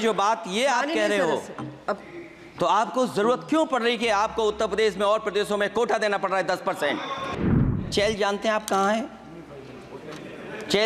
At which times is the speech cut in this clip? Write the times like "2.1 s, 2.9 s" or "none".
7.8 s